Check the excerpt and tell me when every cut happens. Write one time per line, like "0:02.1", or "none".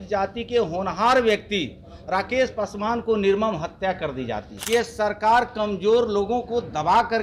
0:04.5